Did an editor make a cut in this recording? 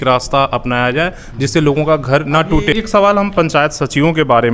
yes; 1 cut; at 2.7 s

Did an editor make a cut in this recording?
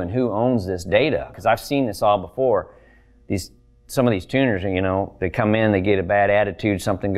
yes; 1 cut; at 1.4 s

